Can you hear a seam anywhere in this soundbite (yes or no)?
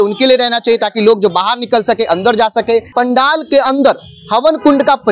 yes